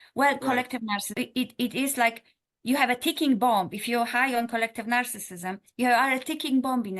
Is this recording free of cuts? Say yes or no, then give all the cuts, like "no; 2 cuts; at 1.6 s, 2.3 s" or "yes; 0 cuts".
no; 1 cut; at 1.2 s